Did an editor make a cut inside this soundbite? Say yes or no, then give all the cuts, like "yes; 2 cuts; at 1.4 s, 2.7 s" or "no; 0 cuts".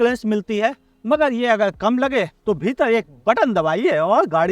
no; 0 cuts